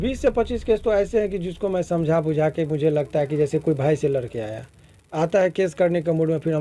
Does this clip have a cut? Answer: no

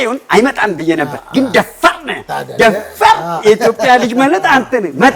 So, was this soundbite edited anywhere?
no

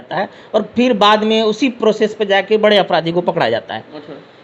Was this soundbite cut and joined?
no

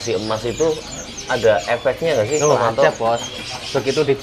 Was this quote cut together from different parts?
no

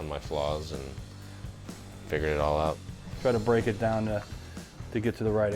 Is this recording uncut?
no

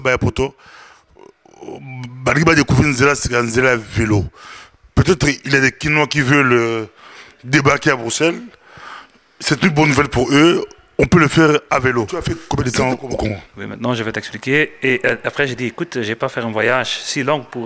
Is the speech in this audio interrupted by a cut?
yes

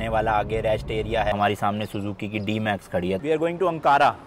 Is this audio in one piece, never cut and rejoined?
no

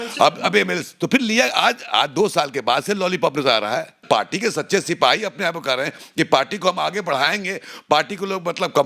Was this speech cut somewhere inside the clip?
yes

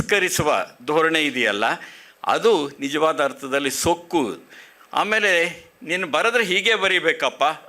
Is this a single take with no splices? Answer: yes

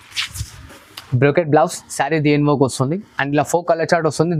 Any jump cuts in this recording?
no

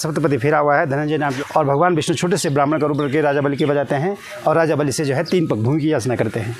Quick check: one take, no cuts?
no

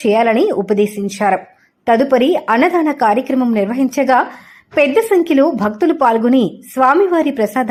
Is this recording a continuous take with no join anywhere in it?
yes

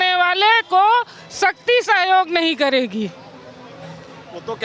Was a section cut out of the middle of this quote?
no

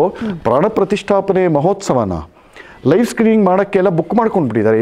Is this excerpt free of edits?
yes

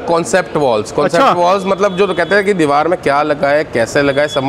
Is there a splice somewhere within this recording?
no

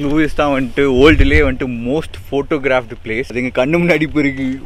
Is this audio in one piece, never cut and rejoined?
no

